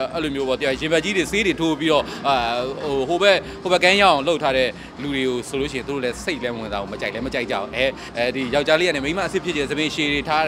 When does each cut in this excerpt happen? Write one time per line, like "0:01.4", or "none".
0:08.0